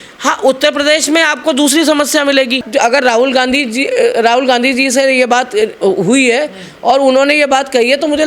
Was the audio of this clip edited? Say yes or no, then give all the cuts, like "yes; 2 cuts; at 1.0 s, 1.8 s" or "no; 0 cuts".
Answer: yes; 1 cut; at 2.7 s